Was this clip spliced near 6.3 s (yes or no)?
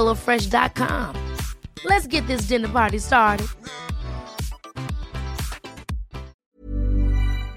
yes